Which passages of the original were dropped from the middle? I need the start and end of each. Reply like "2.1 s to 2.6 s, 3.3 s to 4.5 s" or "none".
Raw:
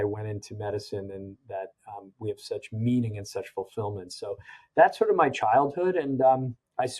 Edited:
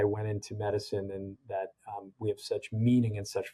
none